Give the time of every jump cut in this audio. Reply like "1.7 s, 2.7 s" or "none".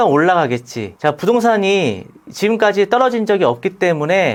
none